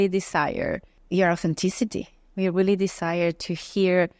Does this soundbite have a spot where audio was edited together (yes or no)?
yes